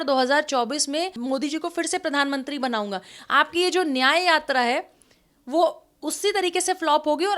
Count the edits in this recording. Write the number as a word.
one